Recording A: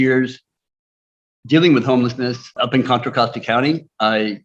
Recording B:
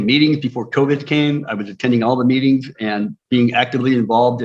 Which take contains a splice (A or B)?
A